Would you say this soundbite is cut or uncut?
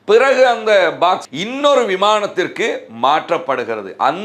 cut